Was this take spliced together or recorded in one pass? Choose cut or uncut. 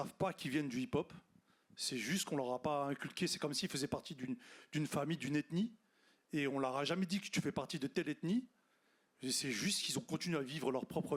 uncut